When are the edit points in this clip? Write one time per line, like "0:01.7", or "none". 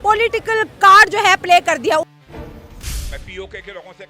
0:02.2